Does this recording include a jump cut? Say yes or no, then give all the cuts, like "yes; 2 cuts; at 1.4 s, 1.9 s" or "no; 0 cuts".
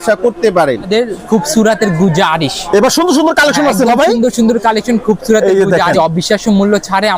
yes; 2 cuts; at 0.9 s, 5.9 s